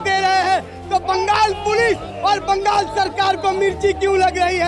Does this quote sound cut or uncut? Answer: uncut